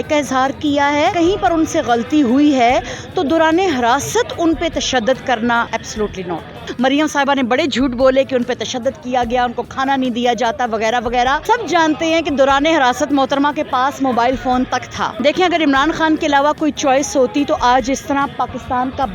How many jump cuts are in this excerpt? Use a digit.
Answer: 2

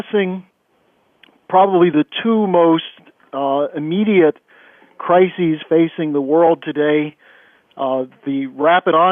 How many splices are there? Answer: 0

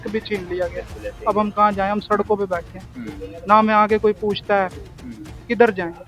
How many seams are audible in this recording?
0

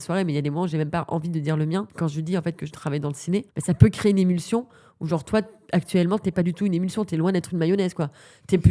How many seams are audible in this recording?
1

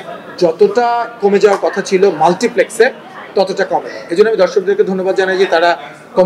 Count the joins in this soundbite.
0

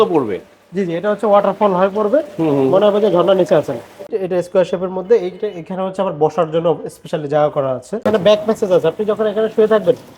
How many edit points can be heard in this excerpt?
2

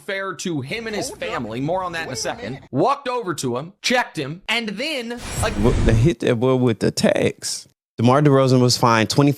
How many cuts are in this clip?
1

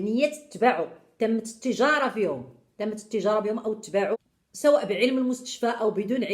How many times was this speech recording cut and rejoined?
1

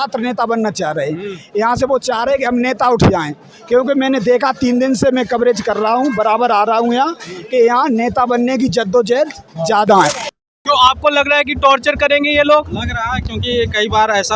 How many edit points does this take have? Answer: 1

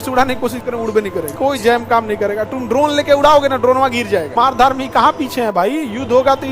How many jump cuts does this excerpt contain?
2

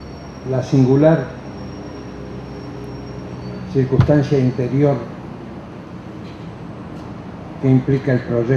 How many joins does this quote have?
1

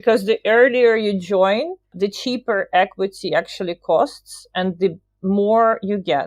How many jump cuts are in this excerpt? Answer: 1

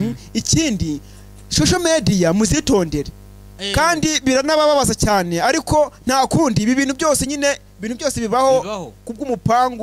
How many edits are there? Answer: 1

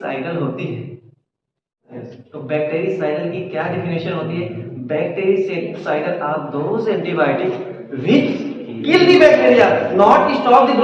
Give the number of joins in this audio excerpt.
1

